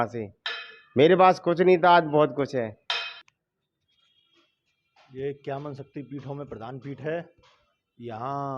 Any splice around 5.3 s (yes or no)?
no